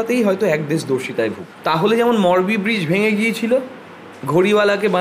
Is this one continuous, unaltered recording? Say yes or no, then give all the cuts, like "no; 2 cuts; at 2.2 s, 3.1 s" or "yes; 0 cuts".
no; 1 cut; at 1.5 s